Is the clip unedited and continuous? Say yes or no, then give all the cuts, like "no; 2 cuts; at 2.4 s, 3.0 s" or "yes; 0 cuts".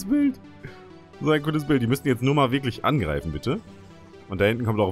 yes; 0 cuts